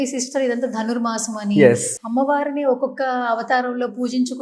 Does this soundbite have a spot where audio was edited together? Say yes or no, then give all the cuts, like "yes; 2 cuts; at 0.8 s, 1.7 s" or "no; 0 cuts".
yes; 1 cut; at 1.9 s